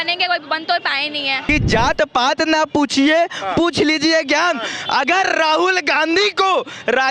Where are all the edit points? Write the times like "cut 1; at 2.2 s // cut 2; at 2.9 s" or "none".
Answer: cut 1; at 1.4 s